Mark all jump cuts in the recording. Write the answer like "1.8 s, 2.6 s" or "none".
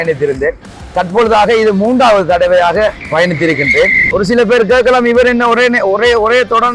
3.0 s, 4.0 s

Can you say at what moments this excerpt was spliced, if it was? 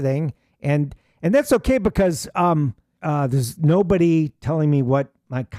2.9 s

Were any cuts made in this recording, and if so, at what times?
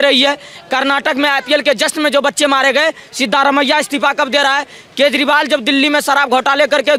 none

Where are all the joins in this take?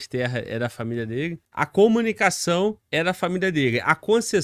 1.7 s, 2.9 s

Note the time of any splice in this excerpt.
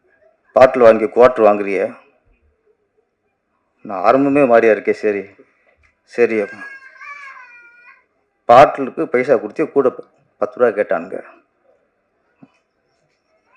none

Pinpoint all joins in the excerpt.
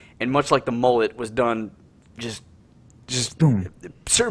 3.4 s

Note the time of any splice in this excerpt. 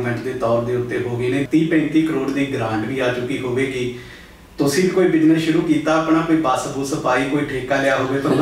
1.5 s

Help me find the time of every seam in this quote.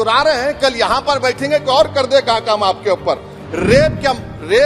3.3 s

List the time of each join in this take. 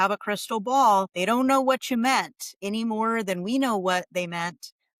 1.1 s

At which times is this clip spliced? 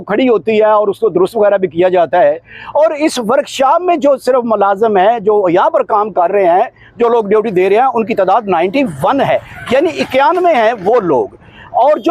none

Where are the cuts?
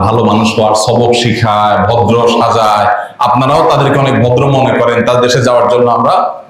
none

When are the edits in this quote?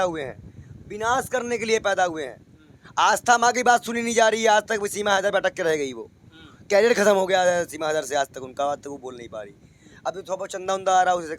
none

